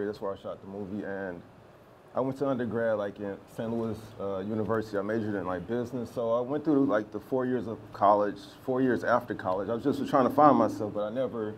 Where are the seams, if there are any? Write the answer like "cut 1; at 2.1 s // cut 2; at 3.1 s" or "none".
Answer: cut 1; at 1.2 s